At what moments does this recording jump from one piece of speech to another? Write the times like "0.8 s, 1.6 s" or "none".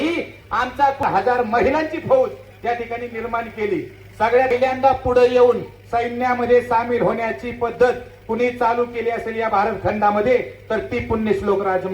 1.0 s, 4.5 s